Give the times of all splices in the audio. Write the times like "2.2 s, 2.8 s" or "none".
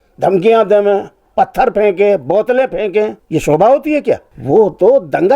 3.2 s, 4.3 s